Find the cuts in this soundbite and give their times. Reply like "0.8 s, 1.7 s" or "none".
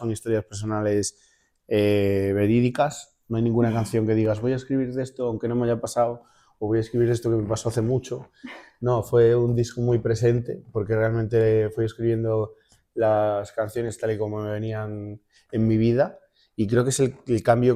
none